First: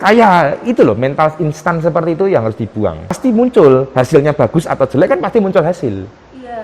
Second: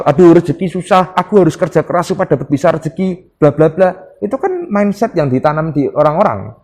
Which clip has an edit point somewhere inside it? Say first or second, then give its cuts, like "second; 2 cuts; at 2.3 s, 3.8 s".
first; 1 cut; at 3.2 s